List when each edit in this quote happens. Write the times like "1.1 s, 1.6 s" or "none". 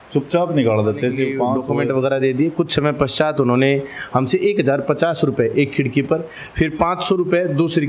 1.6 s